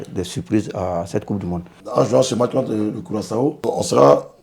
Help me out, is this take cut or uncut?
cut